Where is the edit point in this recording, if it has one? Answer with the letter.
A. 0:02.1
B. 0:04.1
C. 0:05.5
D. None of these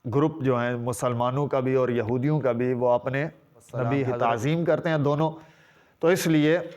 B